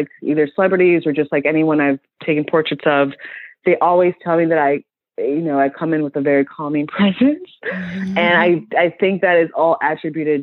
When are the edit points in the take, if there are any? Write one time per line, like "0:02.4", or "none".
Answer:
none

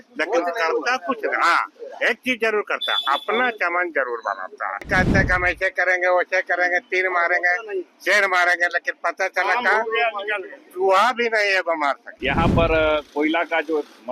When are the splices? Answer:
0:04.9
0:12.1

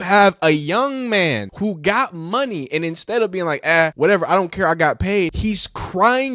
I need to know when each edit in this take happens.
0:01.5
0:03.9
0:05.4

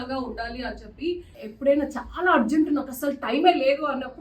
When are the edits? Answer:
0:01.4

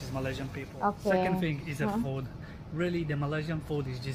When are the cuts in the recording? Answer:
none

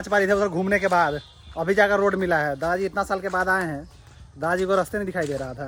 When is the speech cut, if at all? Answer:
none

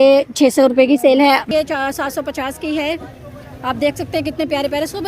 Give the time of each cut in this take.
0:01.5

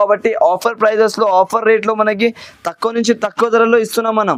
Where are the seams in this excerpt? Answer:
none

